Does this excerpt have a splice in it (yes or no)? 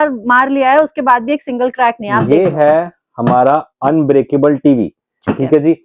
no